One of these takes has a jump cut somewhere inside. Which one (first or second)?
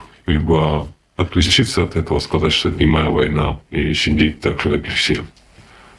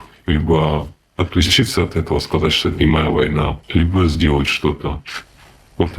second